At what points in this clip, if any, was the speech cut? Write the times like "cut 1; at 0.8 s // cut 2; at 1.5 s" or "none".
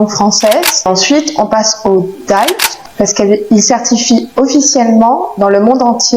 cut 1; at 0.9 s // cut 2; at 2.7 s